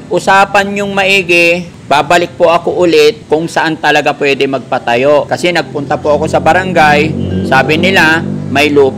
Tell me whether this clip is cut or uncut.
cut